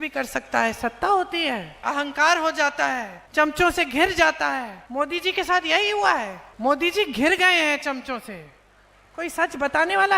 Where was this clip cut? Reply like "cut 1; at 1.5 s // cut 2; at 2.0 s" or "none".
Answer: cut 1; at 1.8 s // cut 2; at 3.2 s // cut 3; at 4.8 s // cut 4; at 6.4 s